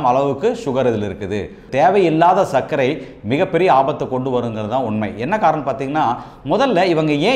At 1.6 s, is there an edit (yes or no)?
yes